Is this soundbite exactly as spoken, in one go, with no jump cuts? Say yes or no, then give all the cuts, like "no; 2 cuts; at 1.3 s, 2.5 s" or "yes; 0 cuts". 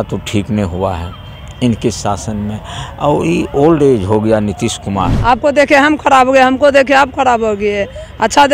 no; 1 cut; at 5.1 s